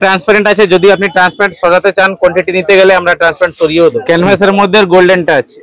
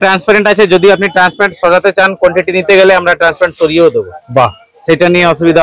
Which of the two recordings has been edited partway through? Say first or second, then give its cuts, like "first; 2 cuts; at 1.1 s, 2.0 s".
first; 1 cut; at 4.0 s